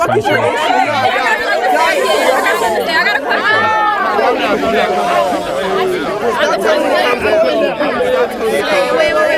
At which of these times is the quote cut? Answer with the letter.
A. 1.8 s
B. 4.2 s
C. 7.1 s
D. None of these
D